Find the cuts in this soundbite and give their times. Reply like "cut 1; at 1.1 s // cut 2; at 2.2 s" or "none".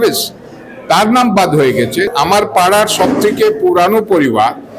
cut 1; at 2.1 s